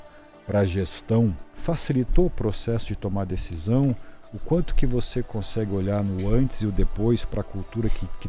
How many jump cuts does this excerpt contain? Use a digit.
1